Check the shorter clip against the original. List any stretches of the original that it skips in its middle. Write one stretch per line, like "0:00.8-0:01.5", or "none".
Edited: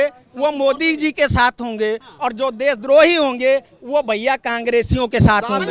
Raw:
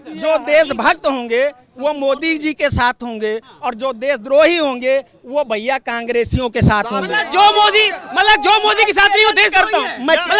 none